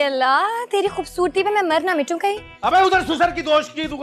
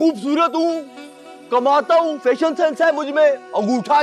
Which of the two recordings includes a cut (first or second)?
first